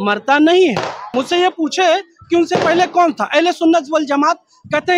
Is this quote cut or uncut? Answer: cut